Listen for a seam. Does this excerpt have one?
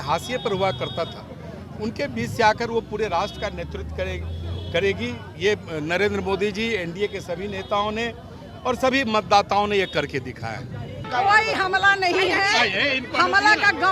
yes; 1 cut; at 11.1 s

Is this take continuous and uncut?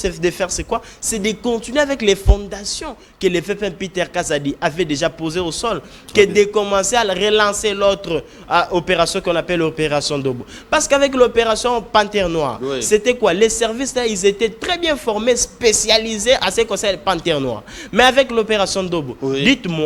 yes; 0 cuts

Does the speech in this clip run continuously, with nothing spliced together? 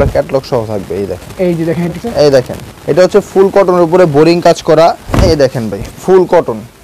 no; 2 cuts; at 2.0 s, 5.1 s

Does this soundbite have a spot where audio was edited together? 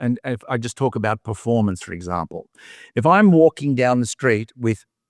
no; 0 cuts

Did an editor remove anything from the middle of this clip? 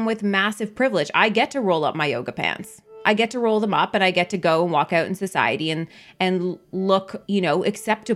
yes; 1 cut; at 7.2 s

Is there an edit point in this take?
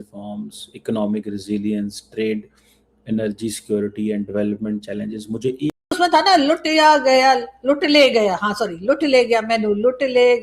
yes; 1 cut; at 5.9 s

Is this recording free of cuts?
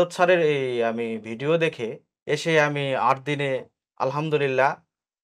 no; 1 cut; at 2.1 s

